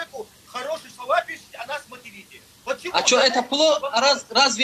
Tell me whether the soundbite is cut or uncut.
uncut